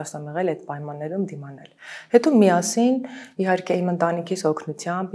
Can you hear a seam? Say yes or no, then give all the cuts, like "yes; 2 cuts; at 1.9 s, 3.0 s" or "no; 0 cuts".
no; 0 cuts